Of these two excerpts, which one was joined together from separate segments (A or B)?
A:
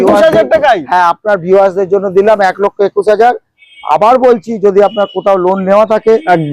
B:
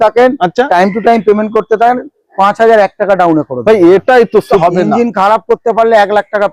B